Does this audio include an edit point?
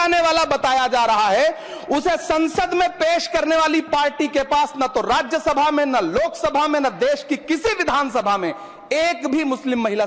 no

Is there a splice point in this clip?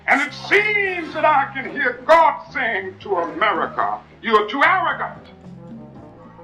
no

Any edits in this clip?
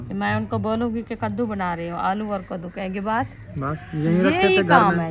no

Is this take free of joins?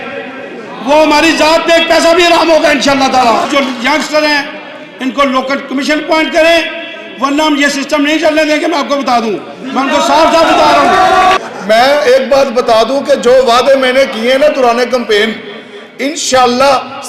no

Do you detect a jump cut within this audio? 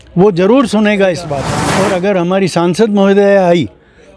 yes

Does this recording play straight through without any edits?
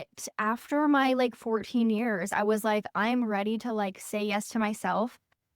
yes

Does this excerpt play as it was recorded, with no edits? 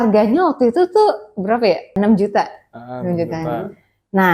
no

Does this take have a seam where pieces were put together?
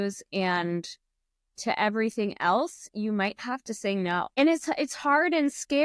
yes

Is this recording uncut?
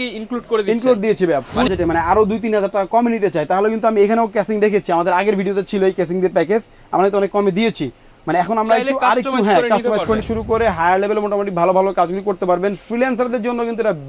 no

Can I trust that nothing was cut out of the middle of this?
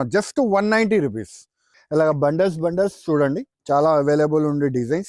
no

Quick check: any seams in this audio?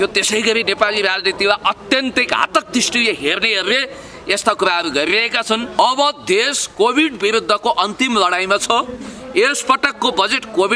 yes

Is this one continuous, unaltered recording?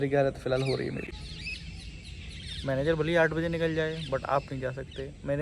no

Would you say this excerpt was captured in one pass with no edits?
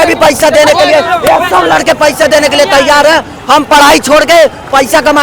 yes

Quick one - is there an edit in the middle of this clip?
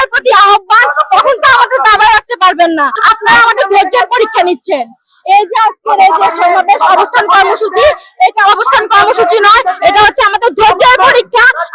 no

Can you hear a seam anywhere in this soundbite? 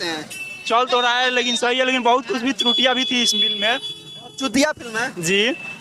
no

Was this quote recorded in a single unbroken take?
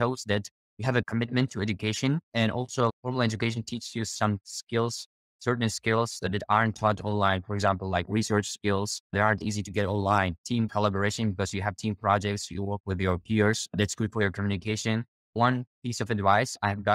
yes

